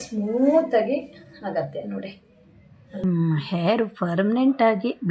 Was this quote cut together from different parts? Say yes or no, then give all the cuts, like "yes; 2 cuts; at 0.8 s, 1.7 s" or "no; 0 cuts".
yes; 1 cut; at 3.0 s